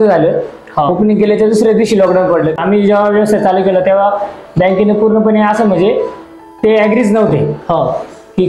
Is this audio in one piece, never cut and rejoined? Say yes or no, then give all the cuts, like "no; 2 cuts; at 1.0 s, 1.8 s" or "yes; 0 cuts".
no; 1 cut; at 2.6 s